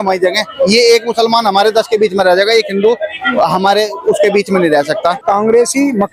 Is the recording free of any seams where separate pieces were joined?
no; 1 cut; at 5.2 s

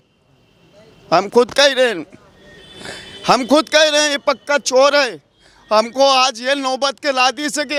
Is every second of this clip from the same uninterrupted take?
yes; 0 cuts

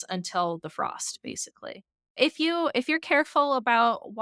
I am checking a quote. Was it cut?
yes; 1 cut; at 2.1 s

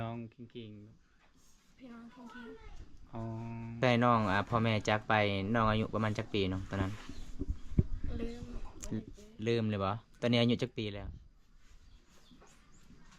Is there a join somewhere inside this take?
yes; 1 cut; at 3.8 s

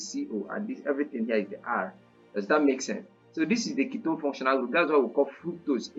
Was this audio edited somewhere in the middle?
no; 0 cuts

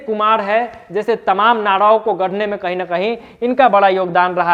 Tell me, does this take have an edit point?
no; 0 cuts

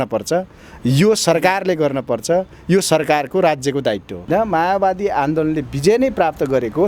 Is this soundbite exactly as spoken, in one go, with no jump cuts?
no; 1 cut; at 4.3 s

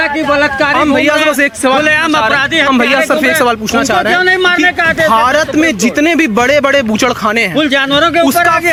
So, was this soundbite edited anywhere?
no; 0 cuts

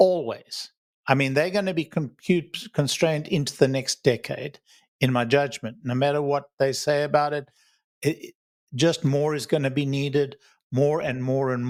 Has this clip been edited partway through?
no; 0 cuts

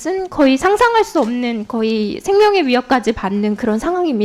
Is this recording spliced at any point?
no; 0 cuts

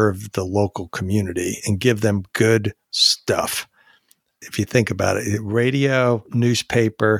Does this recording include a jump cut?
no; 0 cuts

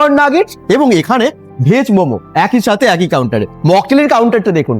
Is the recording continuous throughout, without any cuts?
no; 1 cut; at 3.6 s

